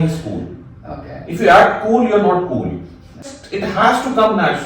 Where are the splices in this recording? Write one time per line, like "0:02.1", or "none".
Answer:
0:03.4